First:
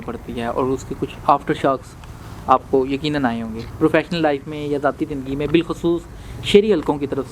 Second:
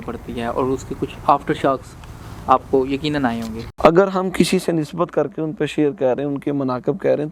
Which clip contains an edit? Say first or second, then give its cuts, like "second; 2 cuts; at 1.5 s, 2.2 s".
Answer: second; 1 cut; at 3.6 s